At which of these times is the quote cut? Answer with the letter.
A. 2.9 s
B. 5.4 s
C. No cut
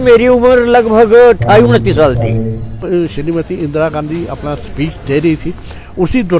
A